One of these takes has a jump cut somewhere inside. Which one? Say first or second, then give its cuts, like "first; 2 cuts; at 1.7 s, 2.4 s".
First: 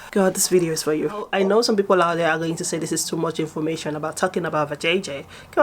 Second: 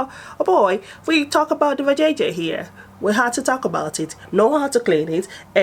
first; 1 cut; at 1.3 s